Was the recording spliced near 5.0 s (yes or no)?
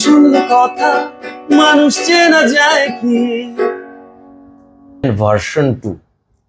yes